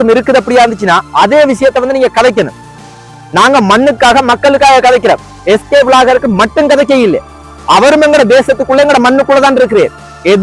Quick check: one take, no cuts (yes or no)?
yes